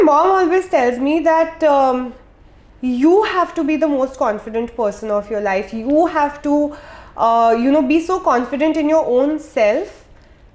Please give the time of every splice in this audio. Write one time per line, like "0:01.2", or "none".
none